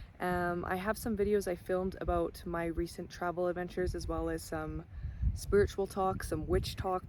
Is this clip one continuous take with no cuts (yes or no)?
yes